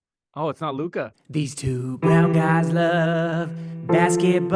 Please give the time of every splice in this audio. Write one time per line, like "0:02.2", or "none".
0:01.2